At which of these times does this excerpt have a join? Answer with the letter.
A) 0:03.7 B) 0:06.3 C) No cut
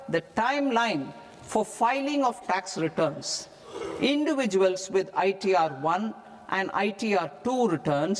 C